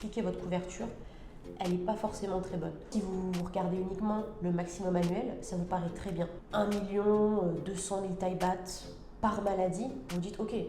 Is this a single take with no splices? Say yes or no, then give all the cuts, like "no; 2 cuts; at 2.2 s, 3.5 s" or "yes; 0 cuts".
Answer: no; 2 cuts; at 2.9 s, 6.4 s